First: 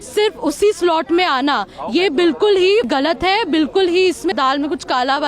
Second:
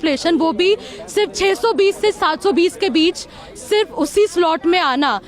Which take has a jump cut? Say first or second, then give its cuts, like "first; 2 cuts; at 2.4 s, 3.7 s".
first; 2 cuts; at 2.9 s, 4.3 s